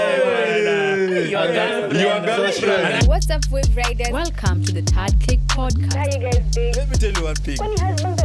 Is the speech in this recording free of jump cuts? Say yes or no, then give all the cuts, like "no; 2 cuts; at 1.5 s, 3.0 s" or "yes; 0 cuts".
no; 1 cut; at 3.0 s